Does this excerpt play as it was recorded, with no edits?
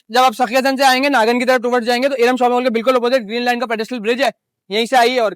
yes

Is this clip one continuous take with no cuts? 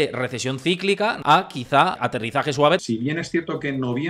no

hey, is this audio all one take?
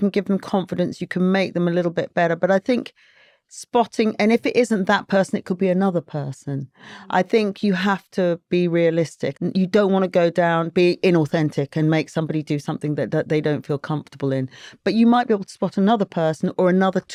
yes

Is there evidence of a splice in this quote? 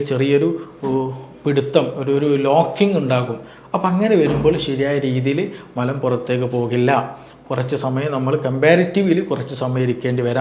no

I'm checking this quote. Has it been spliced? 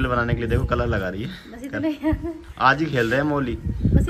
no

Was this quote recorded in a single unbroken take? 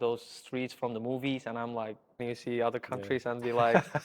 no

